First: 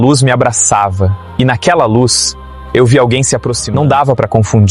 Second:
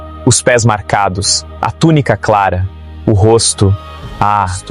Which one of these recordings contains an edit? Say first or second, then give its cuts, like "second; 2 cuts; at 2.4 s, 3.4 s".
first; 1 cut; at 3.5 s